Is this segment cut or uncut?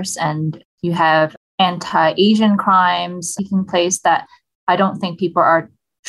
uncut